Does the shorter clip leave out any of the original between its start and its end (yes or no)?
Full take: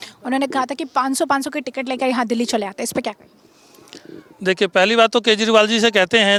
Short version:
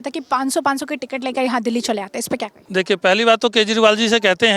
yes